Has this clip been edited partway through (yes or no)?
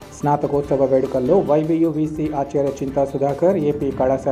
no